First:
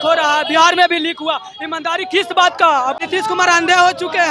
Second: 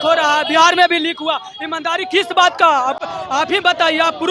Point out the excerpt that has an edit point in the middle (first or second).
first